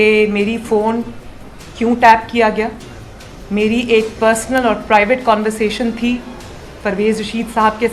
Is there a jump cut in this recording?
no; 0 cuts

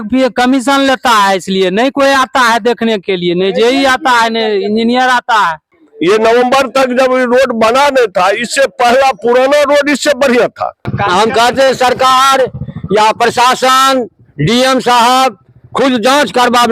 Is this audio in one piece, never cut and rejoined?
no; 2 cuts; at 5.7 s, 10.9 s

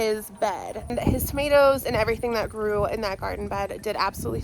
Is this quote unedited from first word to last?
no; 1 cut; at 0.9 s

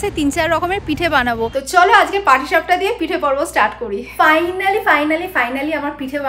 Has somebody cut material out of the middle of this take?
yes; 2 cuts; at 1.5 s, 4.1 s

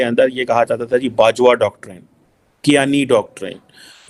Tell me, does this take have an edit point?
no; 0 cuts

